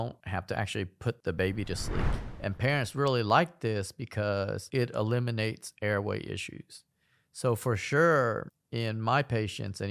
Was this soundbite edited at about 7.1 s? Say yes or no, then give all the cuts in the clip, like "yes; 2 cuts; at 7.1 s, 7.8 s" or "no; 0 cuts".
no; 1 cut; at 2.1 s